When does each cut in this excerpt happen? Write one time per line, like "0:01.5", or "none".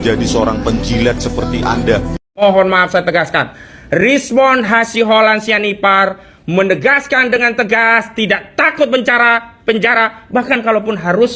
0:02.4